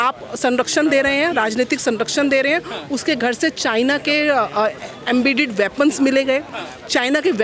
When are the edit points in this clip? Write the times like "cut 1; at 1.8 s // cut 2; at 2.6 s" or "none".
none